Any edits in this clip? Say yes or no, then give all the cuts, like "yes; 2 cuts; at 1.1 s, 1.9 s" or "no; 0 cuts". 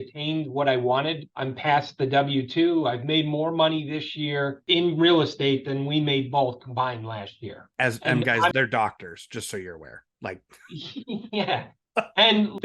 yes; 3 cuts; at 4.6 s, 7.7 s, 8.5 s